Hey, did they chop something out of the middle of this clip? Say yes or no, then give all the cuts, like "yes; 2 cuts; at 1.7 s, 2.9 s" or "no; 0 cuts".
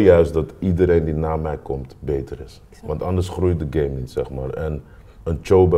no; 0 cuts